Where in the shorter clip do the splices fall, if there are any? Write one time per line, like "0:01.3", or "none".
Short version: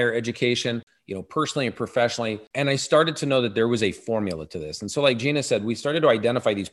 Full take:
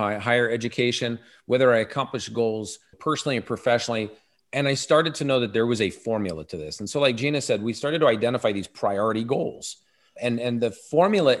0:01.0
0:02.4